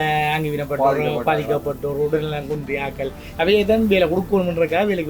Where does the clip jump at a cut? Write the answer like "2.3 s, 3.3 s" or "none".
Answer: none